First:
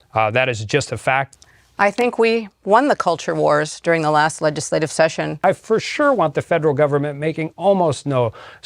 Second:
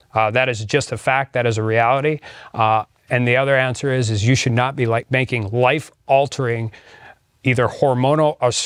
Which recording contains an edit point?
first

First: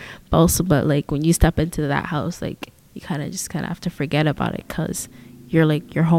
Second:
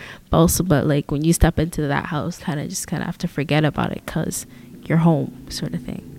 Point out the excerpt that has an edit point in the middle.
second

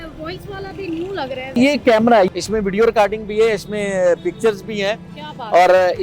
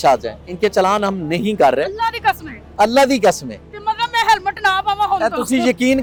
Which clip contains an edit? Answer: first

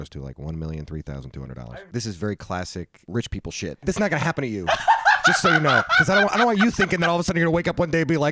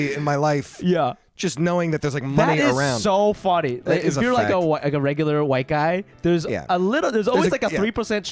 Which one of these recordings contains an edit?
first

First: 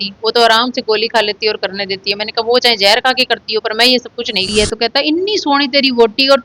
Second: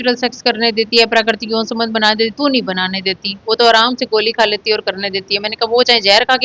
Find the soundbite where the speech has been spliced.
first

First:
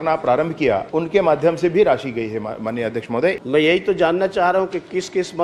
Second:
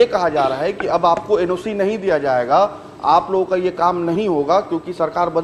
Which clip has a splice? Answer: first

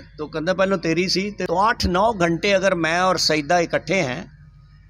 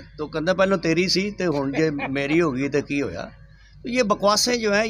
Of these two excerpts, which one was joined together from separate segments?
first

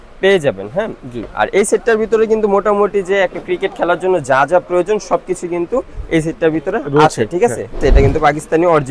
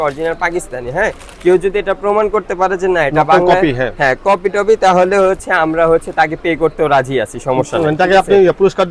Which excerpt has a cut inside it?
first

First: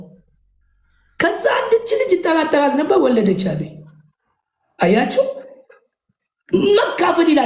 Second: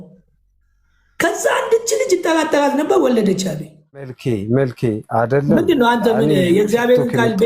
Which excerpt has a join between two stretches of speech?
second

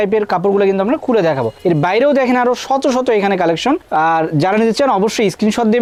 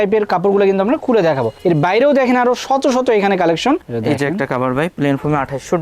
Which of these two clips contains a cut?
second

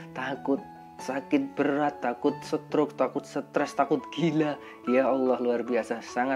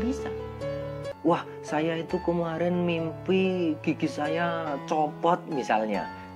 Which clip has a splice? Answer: second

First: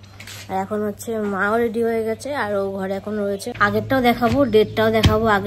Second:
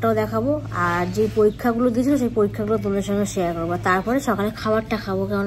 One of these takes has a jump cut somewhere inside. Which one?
first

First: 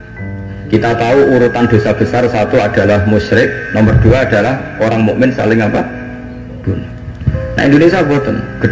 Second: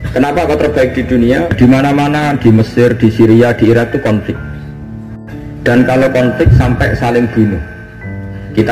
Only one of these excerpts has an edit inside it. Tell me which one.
second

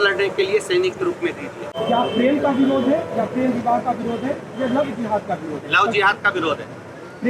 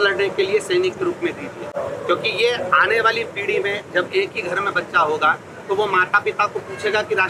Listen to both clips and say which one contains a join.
first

